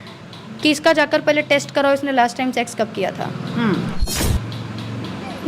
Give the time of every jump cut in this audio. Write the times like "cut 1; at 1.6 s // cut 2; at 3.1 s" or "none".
cut 1; at 4.1 s